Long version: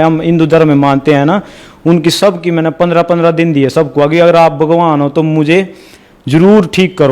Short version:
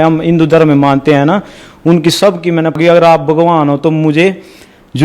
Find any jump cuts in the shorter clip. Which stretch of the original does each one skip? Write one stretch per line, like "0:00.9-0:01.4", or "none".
0:02.8-0:04.1